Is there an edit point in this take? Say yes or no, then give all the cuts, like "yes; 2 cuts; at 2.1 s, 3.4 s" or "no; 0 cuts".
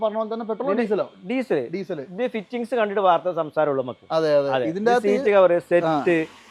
no; 0 cuts